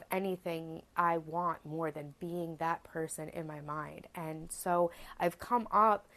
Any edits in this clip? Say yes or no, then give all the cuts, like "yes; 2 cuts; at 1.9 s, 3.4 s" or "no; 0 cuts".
no; 0 cuts